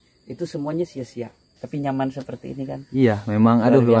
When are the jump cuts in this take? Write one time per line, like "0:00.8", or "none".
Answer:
0:01.5